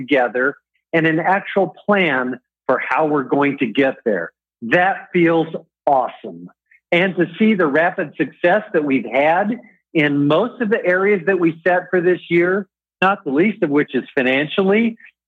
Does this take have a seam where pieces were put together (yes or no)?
no